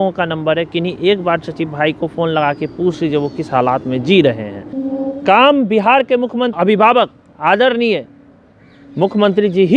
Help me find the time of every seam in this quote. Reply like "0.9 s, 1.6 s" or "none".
4.8 s, 6.5 s